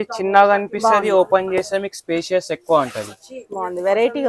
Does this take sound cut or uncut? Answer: uncut